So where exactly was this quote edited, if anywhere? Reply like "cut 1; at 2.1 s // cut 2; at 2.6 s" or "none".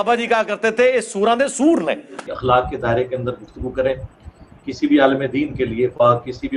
cut 1; at 2.2 s